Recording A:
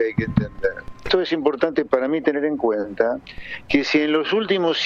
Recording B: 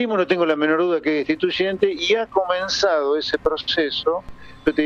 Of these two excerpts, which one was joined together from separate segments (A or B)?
A